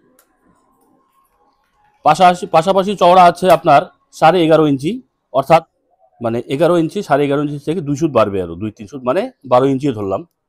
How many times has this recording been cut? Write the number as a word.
one